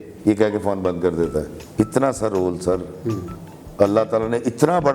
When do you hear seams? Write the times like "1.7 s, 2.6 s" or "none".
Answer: 1.6 s